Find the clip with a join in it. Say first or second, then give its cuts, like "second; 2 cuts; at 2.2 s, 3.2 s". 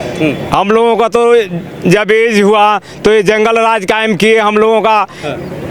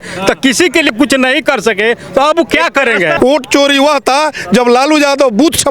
second; 2 cuts; at 0.9 s, 3.1 s